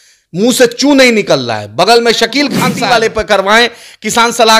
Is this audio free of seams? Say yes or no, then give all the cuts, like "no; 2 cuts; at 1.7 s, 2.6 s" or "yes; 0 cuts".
no; 1 cut; at 2.7 s